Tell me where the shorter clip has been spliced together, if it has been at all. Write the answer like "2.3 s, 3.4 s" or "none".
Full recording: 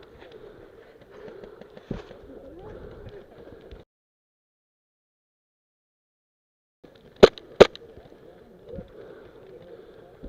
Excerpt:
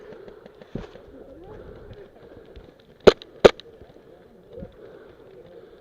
2.7 s